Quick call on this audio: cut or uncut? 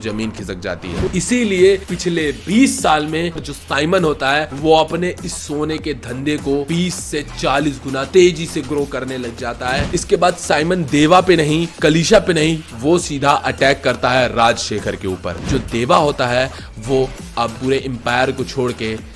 cut